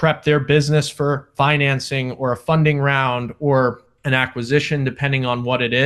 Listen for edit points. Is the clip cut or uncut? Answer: uncut